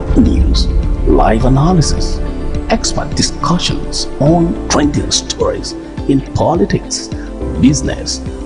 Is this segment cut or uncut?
uncut